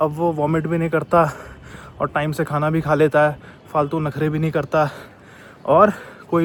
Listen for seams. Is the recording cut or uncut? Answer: uncut